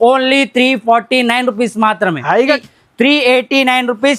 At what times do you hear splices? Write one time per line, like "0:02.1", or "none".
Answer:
0:02.6